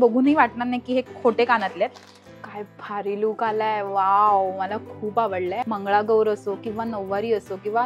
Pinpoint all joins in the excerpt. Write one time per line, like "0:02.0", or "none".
0:02.3
0:05.6